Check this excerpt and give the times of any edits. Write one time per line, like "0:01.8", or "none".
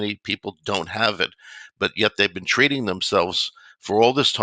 none